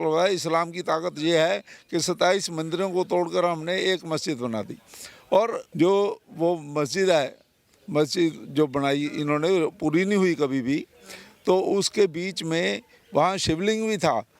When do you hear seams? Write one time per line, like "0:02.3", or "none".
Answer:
0:05.6
0:12.9